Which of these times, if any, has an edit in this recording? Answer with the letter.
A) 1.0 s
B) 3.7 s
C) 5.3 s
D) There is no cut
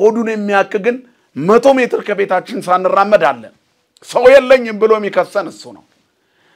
D